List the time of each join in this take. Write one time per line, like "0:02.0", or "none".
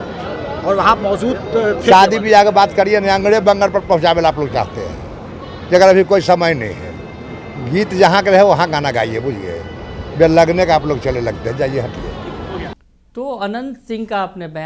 none